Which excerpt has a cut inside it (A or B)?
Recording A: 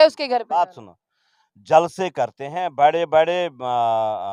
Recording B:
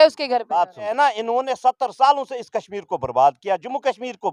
B